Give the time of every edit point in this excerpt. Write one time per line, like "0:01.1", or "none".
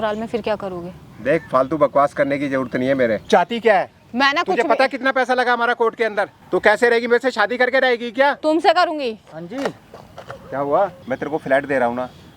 0:03.2
0:06.4
0:11.0